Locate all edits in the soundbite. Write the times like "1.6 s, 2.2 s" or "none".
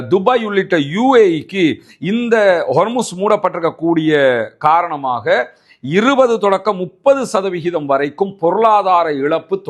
none